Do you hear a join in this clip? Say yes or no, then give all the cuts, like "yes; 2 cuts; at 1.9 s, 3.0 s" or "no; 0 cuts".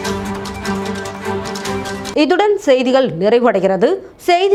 no; 0 cuts